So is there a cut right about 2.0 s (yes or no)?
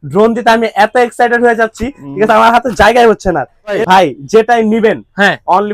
no